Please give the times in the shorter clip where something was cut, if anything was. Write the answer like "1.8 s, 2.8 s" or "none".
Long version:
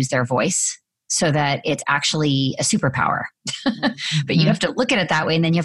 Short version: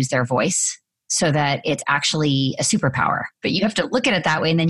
3.4 s